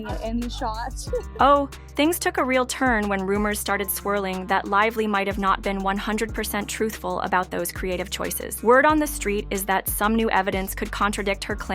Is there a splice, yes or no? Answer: no